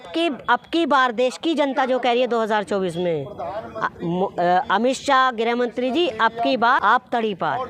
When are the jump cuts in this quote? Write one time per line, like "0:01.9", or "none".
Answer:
0:06.8